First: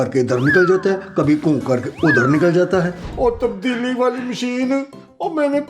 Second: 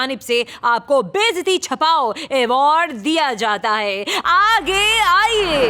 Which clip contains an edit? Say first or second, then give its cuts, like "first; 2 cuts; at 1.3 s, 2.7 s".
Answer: first; 1 cut; at 3.0 s